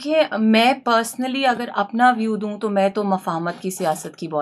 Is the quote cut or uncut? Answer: uncut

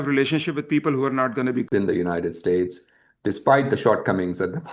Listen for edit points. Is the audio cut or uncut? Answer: cut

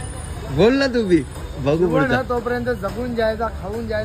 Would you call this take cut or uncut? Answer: uncut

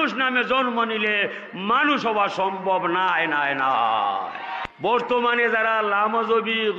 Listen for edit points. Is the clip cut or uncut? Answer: cut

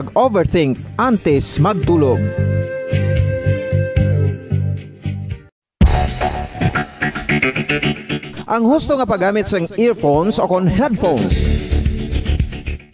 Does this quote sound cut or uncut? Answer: cut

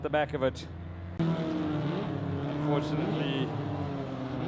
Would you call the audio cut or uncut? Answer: cut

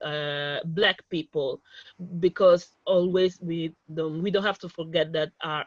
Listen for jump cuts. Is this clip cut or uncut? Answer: uncut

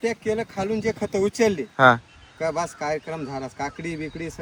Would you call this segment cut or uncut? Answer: uncut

